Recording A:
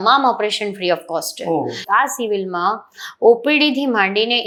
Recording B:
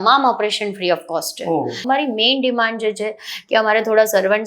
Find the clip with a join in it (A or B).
B